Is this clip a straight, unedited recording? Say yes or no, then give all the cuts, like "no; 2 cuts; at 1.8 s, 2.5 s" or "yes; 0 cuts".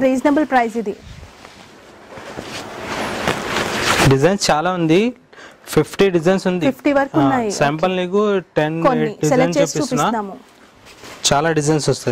yes; 0 cuts